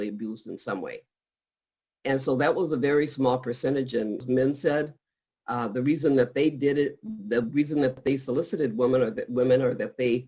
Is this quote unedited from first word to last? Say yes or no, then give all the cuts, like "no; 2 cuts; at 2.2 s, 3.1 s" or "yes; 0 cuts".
no; 1 cut; at 4.2 s